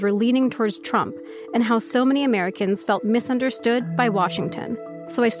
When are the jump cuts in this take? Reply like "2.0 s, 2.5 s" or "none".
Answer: none